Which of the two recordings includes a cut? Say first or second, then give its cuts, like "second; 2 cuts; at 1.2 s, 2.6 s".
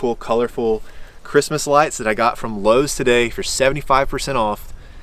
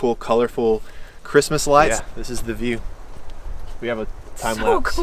second; 1 cut; at 1.9 s